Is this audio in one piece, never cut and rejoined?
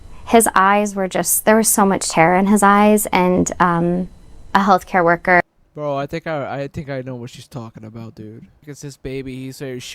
no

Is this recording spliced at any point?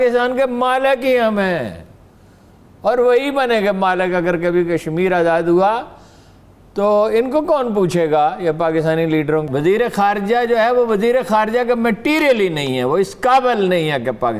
yes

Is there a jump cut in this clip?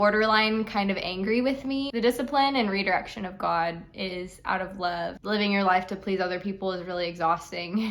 yes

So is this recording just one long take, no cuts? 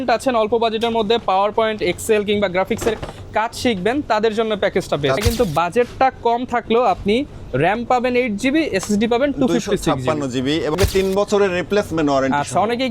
no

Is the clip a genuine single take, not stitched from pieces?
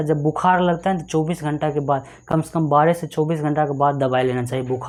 yes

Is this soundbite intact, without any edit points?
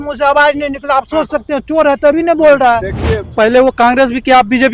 no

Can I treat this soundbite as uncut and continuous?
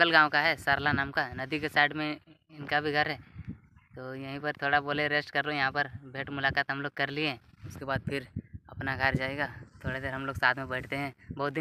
no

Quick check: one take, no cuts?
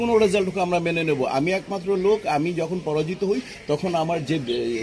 yes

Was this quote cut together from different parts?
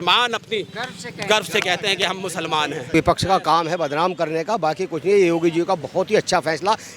yes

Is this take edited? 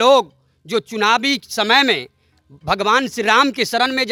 no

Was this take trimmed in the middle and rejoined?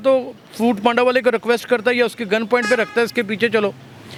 no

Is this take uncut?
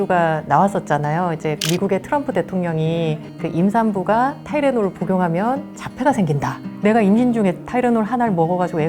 yes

